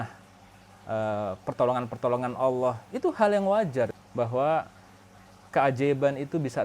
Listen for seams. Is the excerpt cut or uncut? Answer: cut